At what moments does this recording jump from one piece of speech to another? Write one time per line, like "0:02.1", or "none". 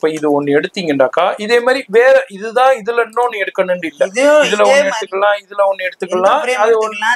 none